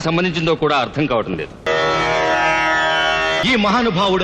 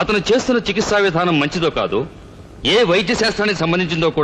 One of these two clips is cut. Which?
first; 2 cuts; at 1.7 s, 3.4 s

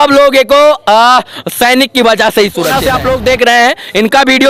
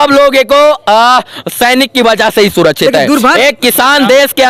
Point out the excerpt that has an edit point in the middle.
first; 1 cut; at 2.8 s

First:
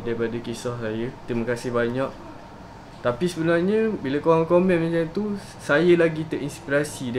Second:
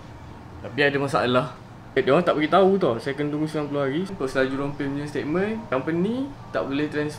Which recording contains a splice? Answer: second; 2 cuts; at 2.0 s, 4.1 s

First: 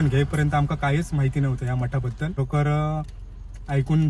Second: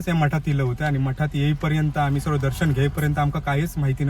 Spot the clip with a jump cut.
first; 1 cut; at 2.4 s

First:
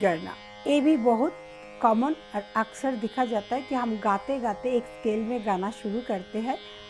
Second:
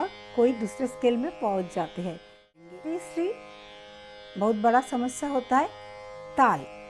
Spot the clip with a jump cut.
second; 1 cut; at 2.6 s

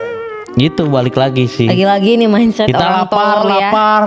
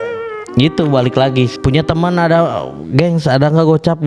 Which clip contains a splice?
second; 1 cut; at 1.5 s

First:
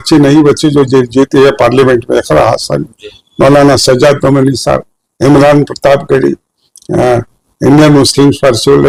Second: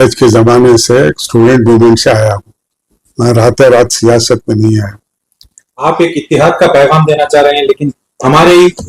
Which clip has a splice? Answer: second; 1 cut; at 5.7 s

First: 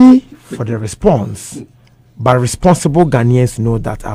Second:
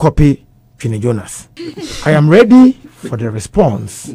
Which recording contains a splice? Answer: second; 1 cut; at 1.5 s

